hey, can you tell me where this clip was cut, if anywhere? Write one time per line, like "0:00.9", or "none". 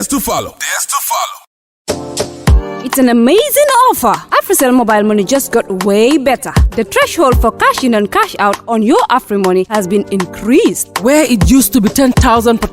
0:01.4